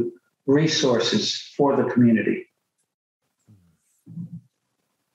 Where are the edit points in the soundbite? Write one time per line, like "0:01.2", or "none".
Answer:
none